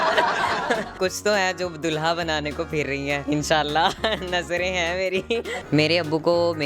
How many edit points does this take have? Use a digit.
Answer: 3